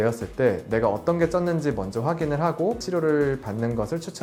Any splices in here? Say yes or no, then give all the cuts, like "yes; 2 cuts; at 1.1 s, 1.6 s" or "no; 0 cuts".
no; 0 cuts